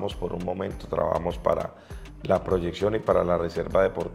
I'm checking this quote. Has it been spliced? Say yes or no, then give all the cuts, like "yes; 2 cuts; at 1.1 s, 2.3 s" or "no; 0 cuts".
no; 0 cuts